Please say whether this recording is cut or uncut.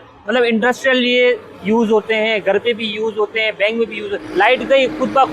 cut